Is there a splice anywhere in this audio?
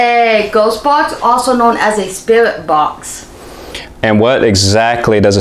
no; 0 cuts

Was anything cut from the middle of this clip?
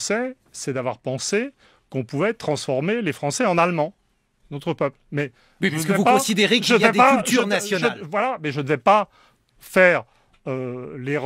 no; 0 cuts

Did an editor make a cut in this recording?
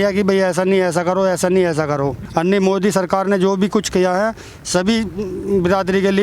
yes; 1 cut; at 2.2 s

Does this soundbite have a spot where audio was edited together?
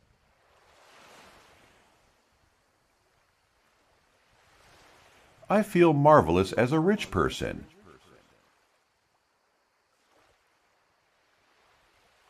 yes; 2 cuts; at 5.4 s, 8.5 s

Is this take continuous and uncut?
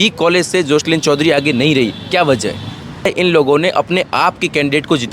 no; 1 cut; at 3.1 s

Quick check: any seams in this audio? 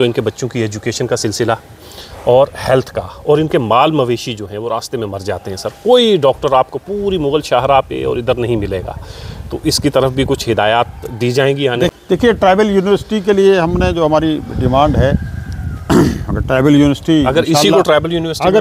yes; 1 cut; at 11.9 s

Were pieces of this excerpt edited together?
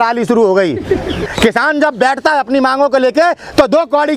yes; 1 cut; at 1.3 s

